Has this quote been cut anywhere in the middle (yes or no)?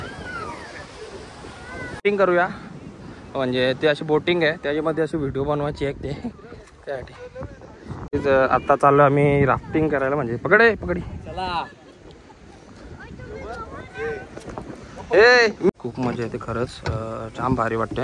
yes